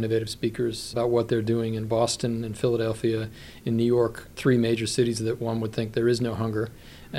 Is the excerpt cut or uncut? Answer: cut